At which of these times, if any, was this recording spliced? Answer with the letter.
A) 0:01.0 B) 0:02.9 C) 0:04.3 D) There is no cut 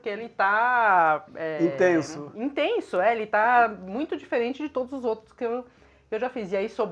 D